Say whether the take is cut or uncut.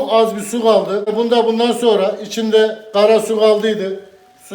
cut